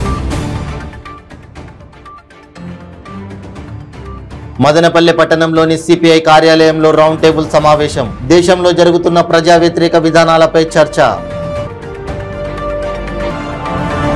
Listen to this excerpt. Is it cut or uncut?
cut